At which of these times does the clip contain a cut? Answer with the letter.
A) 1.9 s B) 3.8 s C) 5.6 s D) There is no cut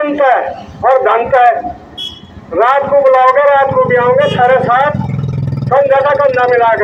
D